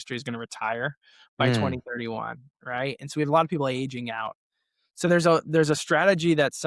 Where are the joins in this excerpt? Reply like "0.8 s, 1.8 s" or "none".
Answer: none